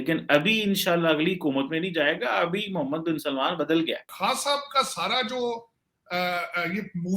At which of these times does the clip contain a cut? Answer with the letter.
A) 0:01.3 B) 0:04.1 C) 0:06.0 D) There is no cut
B